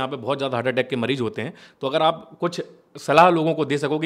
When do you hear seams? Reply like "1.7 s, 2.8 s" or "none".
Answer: none